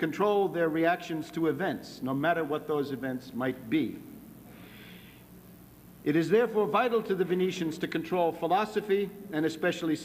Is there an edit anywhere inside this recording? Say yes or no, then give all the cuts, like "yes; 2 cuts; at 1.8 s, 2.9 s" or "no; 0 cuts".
no; 0 cuts